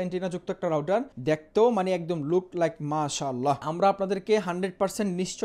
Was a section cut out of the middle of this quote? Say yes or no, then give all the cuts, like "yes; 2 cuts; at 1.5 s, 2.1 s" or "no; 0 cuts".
yes; 2 cuts; at 1.1 s, 3.7 s